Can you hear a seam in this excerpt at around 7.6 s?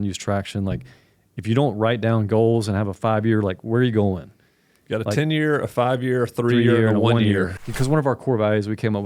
yes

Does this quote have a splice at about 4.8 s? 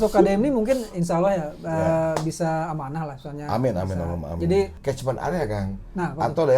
yes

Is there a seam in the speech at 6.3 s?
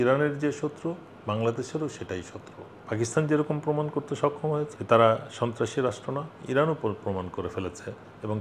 no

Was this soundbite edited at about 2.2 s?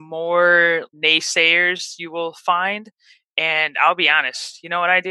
no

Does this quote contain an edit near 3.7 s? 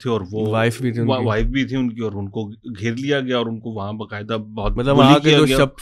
no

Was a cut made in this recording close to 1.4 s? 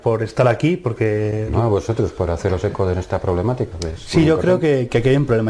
yes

